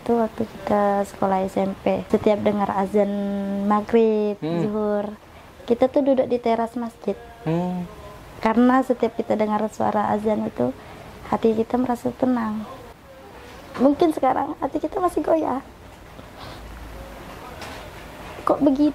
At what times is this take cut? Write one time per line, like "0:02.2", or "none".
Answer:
0:02.0
0:12.8